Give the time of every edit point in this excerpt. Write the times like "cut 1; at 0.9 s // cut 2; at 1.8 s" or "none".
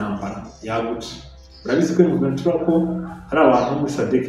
none

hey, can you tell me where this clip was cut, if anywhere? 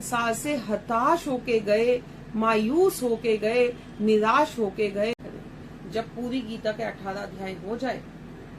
cut 1; at 5.1 s

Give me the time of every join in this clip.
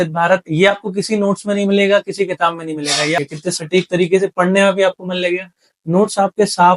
cut 1; at 3.2 s

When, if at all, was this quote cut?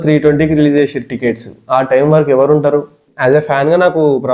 cut 1; at 3.0 s

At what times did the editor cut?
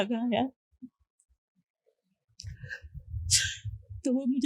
none

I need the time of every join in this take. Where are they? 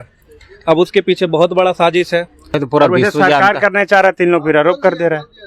cut 1; at 2.4 s

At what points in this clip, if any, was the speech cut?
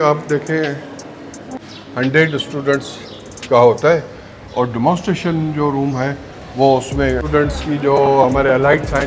cut 1; at 1.6 s // cut 2; at 7.2 s

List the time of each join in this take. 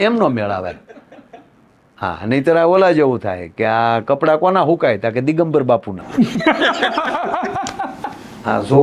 none

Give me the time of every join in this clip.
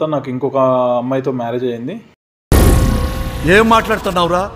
none

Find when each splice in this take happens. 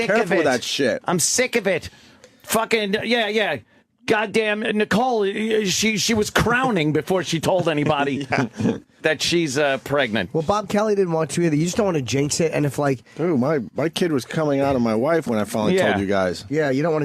cut 1; at 6.1 s

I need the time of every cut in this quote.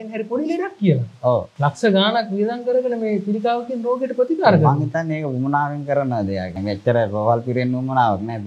cut 1; at 1.5 s // cut 2; at 6.5 s

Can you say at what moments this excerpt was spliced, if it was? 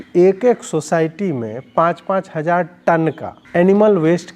cut 1; at 3.3 s

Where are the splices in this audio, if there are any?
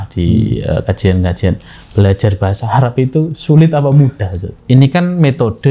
cut 1; at 4.6 s

